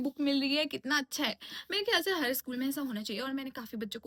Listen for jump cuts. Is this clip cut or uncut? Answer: uncut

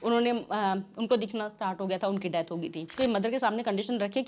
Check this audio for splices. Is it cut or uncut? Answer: cut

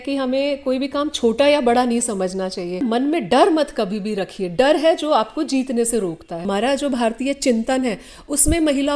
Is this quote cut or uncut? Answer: cut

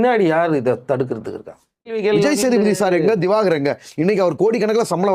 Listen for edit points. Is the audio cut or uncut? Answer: cut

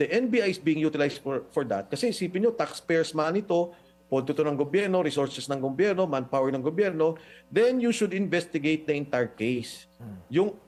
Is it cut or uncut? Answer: uncut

